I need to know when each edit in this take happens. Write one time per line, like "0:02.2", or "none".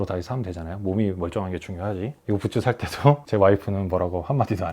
0:02.2
0:03.2